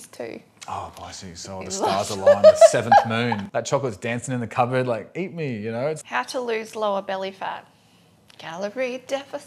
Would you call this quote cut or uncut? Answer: cut